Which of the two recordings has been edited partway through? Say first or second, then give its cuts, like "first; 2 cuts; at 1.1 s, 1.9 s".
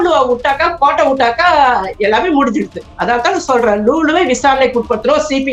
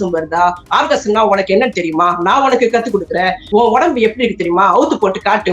second; 1 cut; at 3.4 s